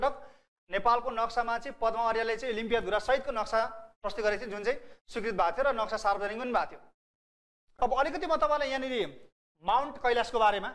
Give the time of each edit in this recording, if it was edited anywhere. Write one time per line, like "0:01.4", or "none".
0:07.7